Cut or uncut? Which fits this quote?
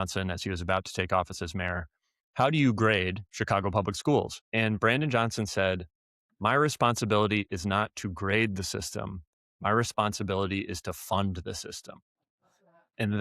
cut